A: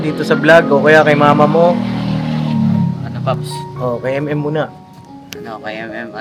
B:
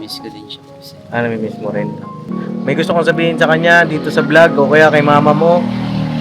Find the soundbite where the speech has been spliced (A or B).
B